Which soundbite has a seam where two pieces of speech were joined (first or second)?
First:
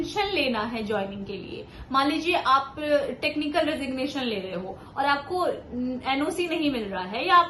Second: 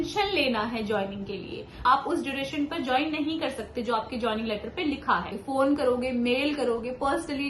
second